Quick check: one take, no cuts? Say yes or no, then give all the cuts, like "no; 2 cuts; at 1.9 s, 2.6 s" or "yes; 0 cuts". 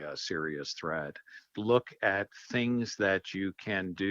no; 1 cut; at 1.5 s